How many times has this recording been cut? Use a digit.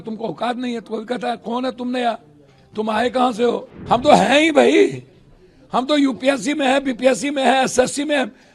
1